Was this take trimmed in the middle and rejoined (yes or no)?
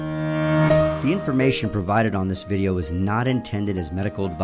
yes